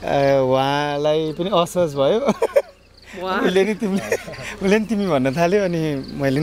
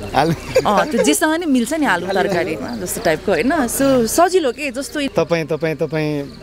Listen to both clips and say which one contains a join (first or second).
second